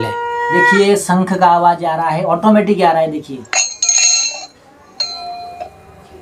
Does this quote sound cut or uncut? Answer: uncut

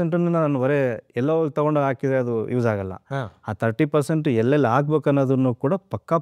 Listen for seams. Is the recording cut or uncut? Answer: uncut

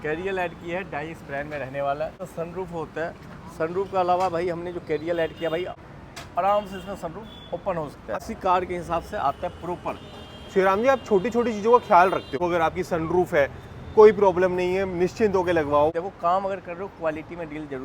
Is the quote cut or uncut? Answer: cut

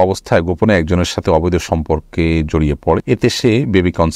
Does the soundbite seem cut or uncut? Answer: cut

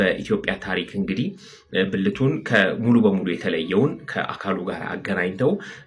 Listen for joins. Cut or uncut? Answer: uncut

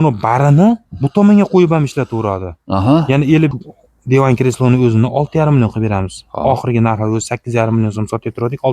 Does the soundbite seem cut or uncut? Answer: cut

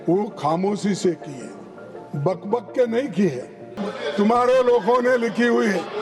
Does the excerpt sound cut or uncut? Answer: cut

